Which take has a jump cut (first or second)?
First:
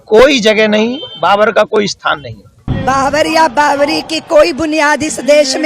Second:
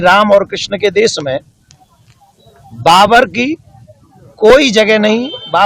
first